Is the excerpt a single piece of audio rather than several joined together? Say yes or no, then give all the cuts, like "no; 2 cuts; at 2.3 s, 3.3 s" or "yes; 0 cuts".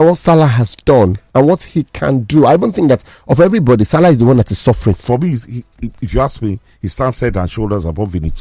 no; 1 cut; at 5.0 s